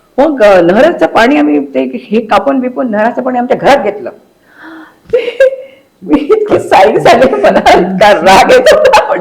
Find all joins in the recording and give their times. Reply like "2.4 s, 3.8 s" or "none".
none